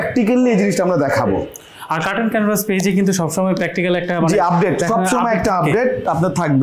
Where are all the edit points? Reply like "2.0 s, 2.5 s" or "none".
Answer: none